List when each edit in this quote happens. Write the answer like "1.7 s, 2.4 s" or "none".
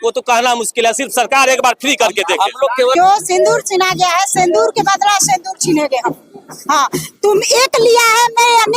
2.7 s